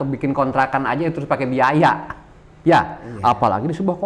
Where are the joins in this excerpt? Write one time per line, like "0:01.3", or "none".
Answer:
none